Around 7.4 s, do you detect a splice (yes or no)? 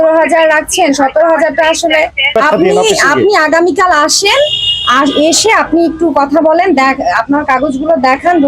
no